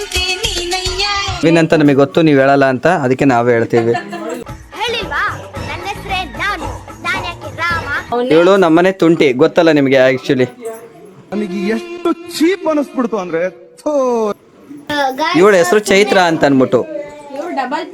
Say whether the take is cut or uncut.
cut